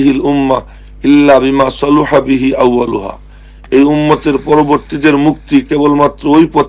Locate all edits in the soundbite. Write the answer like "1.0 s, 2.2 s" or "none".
none